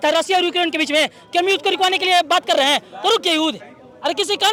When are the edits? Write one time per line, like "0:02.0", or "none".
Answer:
none